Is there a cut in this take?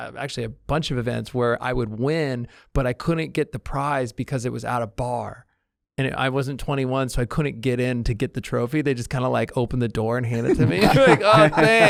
no; 0 cuts

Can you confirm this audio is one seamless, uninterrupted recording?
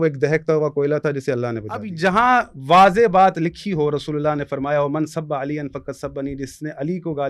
no; 1 cut; at 1.9 s

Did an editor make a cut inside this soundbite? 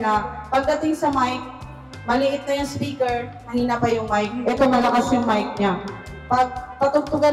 no; 0 cuts

